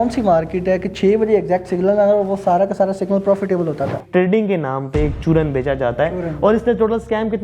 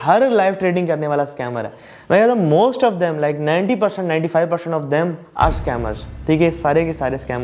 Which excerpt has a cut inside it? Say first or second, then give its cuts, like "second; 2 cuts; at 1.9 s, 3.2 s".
first; 1 cut; at 4.0 s